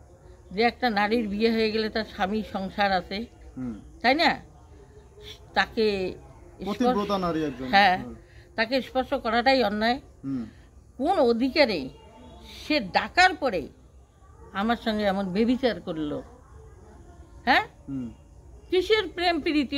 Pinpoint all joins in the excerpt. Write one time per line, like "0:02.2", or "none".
none